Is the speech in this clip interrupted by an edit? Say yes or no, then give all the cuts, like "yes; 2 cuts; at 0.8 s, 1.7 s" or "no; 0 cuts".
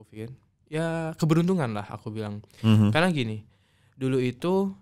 no; 0 cuts